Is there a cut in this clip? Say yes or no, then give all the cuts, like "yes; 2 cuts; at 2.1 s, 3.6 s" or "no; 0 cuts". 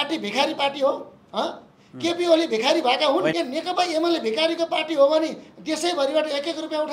yes; 1 cut; at 3.3 s